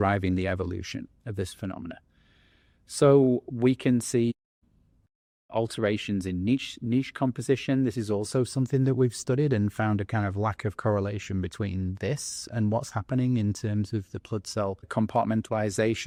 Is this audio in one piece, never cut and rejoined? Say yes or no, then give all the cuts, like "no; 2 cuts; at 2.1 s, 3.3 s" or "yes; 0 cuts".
yes; 0 cuts